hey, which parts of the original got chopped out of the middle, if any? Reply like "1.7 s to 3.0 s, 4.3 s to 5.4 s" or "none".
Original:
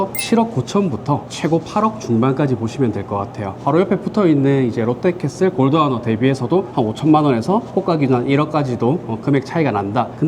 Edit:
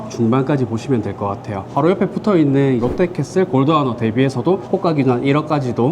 4.7 s to 4.9 s, 6.7 s to 7.7 s

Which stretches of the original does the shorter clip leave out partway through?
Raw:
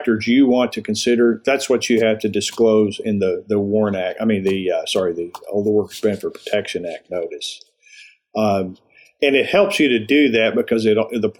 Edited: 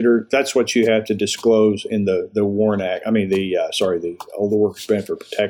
none

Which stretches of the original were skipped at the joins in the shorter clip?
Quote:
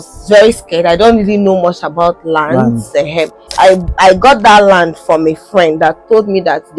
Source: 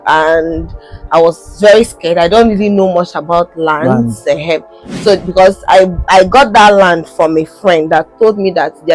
4.8 s to 5.6 s

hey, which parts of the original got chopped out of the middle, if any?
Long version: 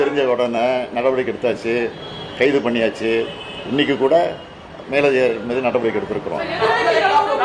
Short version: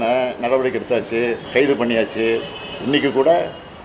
2.0 s to 2.3 s

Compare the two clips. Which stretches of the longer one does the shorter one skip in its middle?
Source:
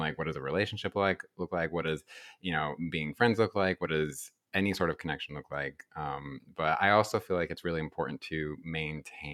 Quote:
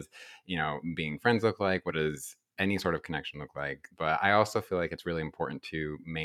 5.8 s to 6.4 s

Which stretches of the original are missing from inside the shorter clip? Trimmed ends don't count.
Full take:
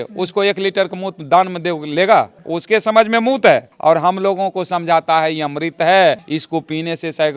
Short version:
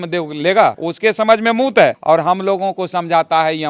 2.4 s to 2.5 s, 3.7 s to 3.8 s

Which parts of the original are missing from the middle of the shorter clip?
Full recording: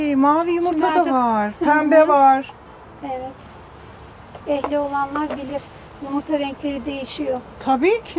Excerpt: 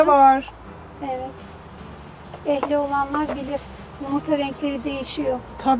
none

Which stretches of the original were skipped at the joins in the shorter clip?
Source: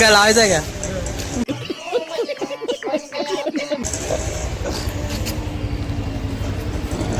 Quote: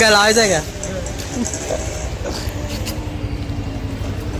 1.5 s to 3.9 s

